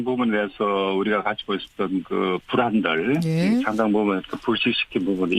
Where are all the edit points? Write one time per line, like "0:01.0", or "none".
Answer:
0:01.5